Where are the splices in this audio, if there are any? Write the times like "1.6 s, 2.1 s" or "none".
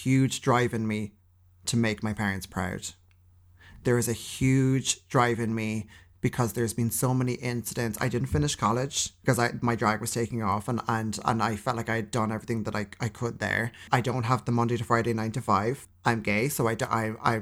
9.0 s, 13.8 s, 15.9 s